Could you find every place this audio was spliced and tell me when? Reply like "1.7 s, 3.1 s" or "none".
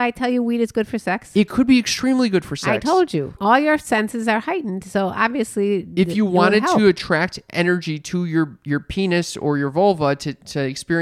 3.4 s